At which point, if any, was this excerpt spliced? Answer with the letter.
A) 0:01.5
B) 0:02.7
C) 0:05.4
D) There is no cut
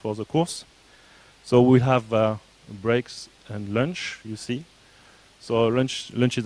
C